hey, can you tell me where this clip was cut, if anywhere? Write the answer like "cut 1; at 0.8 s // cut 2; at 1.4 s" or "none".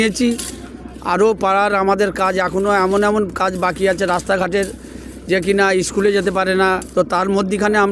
cut 1; at 6.8 s